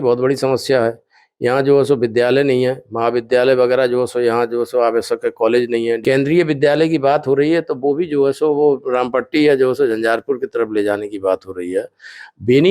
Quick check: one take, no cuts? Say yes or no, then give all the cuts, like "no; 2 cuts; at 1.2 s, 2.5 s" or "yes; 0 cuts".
no; 1 cut; at 6.0 s